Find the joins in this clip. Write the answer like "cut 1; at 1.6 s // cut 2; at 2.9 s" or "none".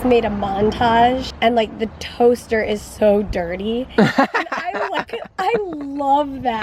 cut 1; at 1.3 s